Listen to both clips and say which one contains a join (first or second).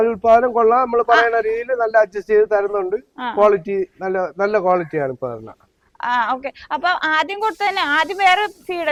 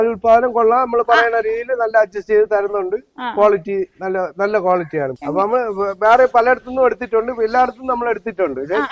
second